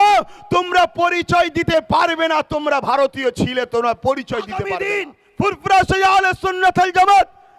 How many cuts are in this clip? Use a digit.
1